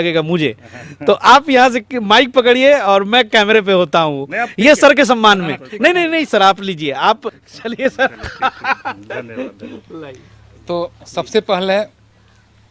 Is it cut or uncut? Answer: uncut